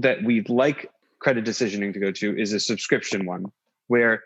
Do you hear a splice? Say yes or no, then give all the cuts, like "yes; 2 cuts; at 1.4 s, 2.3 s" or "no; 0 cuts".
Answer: no; 0 cuts